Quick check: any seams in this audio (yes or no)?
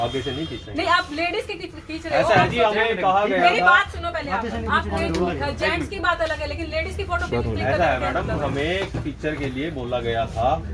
no